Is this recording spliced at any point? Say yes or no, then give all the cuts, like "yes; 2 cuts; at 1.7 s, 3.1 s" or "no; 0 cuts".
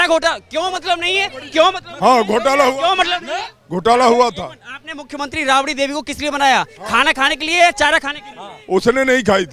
no; 0 cuts